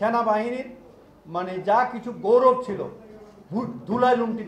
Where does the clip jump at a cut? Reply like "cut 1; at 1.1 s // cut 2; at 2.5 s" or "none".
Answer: none